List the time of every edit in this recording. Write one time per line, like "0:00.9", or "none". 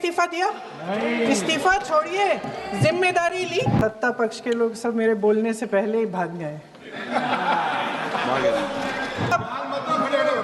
0:03.8
0:09.3